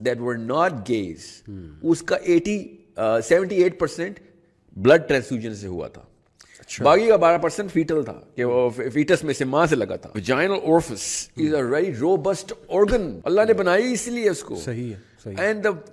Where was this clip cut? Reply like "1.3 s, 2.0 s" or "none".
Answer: 10.1 s, 13.1 s